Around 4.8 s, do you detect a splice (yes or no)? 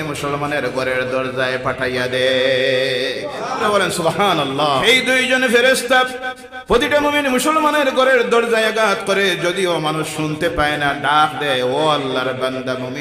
yes